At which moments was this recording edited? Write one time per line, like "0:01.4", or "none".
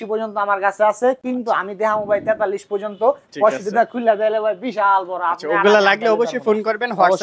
none